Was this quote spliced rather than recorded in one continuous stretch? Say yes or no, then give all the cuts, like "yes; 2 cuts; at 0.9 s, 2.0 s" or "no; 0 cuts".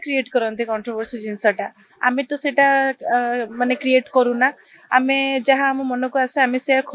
no; 0 cuts